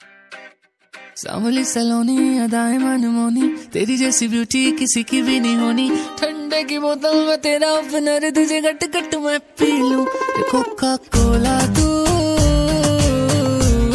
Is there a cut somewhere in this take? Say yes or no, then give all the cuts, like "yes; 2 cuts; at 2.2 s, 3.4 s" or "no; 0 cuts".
yes; 1 cut; at 1.1 s